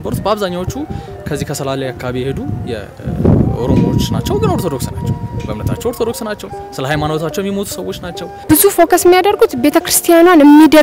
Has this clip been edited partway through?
yes; 1 cut; at 8.4 s

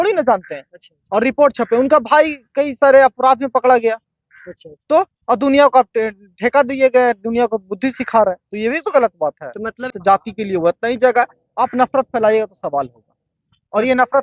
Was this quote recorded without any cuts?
no; 1 cut; at 9.9 s

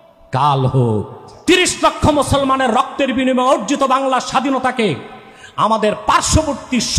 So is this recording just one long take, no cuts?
no; 1 cut; at 1.3 s

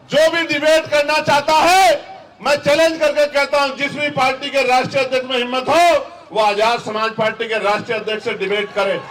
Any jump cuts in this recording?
no; 0 cuts

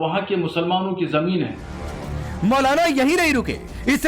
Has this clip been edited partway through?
yes; 1 cut; at 2.2 s

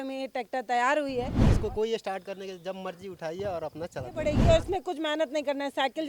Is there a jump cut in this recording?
yes; 2 cuts; at 1.4 s, 4.4 s

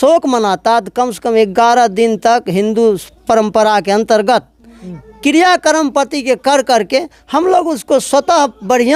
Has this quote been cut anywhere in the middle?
no; 0 cuts

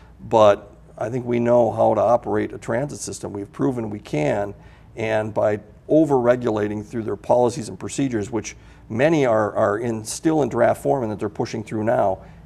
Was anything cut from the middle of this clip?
no; 0 cuts

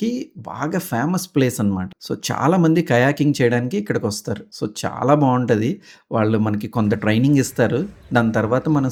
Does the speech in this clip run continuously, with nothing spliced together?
yes; 0 cuts

